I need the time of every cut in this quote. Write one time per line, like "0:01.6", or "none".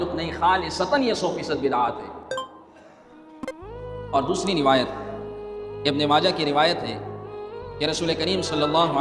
none